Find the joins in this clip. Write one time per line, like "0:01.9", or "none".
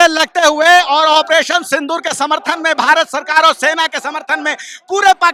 none